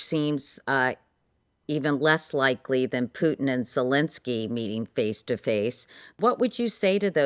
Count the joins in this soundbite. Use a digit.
1